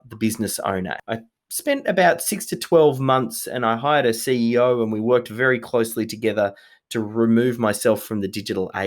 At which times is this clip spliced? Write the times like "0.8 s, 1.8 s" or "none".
1.0 s